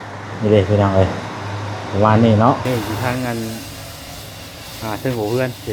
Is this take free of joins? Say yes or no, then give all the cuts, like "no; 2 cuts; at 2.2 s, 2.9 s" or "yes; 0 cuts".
no; 1 cut; at 2.6 s